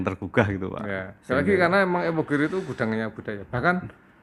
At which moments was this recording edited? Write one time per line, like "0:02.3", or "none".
none